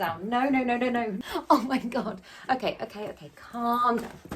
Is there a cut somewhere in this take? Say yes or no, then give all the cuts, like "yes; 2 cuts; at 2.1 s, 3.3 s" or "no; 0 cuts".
yes; 1 cut; at 1.2 s